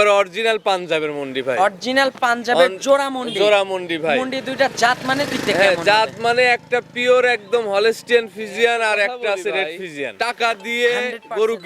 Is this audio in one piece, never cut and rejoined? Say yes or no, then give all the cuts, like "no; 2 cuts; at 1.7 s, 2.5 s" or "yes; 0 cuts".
no; 1 cut; at 10.1 s